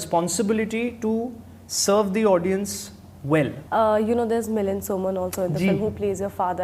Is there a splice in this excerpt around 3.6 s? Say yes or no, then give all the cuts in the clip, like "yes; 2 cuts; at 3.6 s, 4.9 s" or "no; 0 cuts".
yes; 1 cut; at 3.6 s